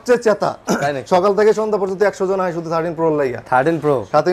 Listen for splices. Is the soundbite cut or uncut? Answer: uncut